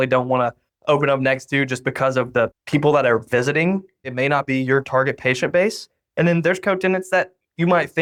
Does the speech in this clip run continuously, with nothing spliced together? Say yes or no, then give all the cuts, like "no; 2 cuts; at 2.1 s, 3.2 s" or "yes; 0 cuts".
yes; 0 cuts